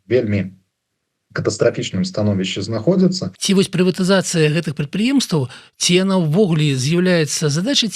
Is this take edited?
yes; 1 cut; at 3.3 s

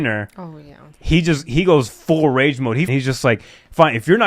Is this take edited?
yes; 1 cut; at 2.9 s

